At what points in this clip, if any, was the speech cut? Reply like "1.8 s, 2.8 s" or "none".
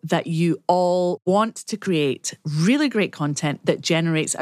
1.4 s